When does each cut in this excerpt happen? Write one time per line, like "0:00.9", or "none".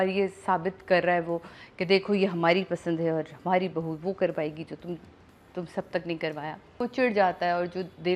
0:06.8